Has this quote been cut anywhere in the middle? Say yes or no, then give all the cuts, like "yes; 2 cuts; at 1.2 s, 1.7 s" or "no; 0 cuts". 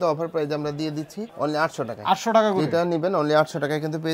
no; 0 cuts